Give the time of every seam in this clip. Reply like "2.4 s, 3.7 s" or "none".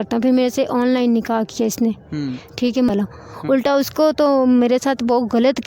2.9 s